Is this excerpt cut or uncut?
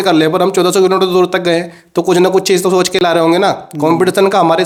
uncut